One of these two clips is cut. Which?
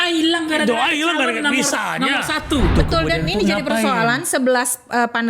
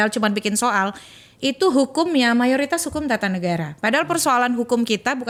first; 1 cut; at 2.7 s

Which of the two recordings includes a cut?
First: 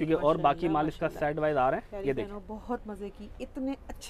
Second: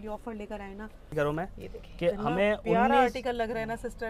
second; 1 cut; at 1.1 s

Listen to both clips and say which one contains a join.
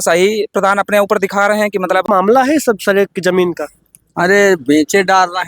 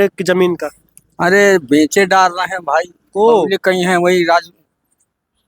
first; 1 cut; at 2.1 s

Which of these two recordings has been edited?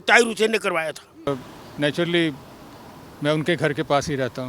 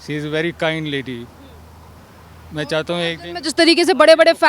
first; 1 cut; at 1.3 s

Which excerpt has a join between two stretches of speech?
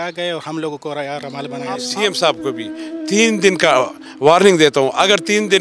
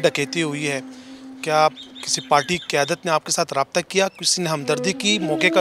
first; 1 cut; at 1.9 s

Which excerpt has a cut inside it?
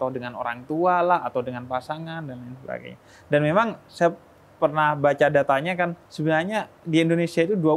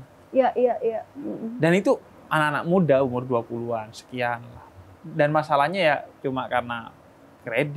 first; 1 cut; at 6.1 s

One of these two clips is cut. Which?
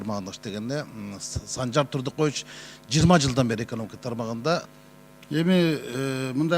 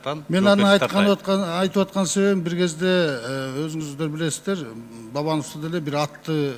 first; 1 cut; at 4.8 s

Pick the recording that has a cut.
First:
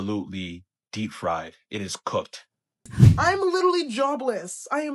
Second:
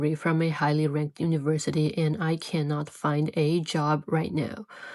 first; 1 cut; at 3.0 s

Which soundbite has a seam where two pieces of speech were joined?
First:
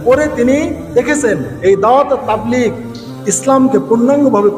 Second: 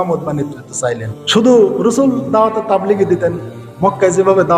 second; 1 cut; at 1.1 s

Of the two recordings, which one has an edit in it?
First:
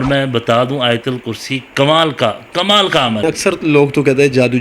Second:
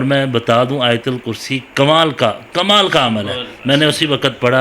first; 1 cut; at 3.2 s

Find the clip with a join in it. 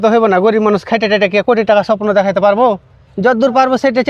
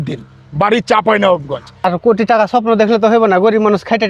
second; 1 cut; at 1.7 s

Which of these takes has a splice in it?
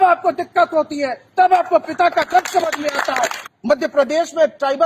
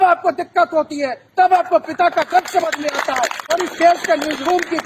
first; 1 cut; at 3.4 s

